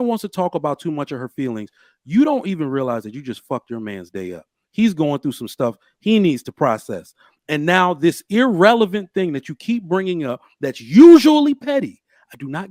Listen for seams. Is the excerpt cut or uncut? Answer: uncut